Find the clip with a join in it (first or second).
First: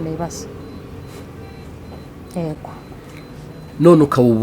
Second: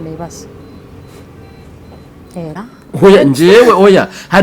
second